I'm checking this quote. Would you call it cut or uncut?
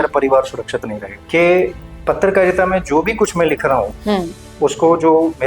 cut